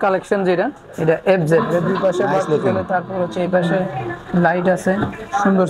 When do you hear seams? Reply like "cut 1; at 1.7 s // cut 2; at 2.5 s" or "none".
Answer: cut 1; at 1.7 s